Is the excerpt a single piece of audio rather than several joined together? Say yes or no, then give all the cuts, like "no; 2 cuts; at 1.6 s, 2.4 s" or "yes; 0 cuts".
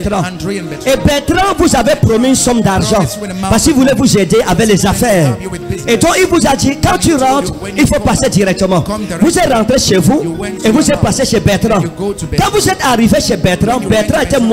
yes; 0 cuts